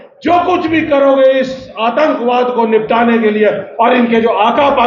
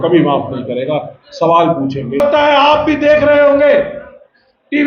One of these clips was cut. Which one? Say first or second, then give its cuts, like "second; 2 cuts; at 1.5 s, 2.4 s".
second; 1 cut; at 2.2 s